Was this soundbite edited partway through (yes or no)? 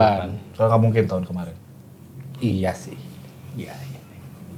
no